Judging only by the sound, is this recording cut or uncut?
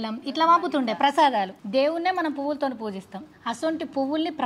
cut